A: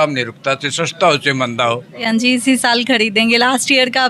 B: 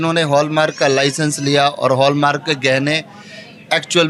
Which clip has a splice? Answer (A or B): A